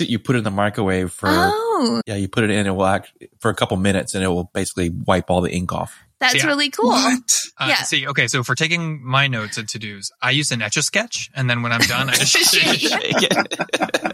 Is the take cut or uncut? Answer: uncut